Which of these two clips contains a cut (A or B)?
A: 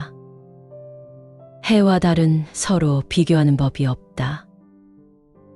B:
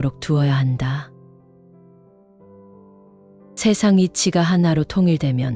B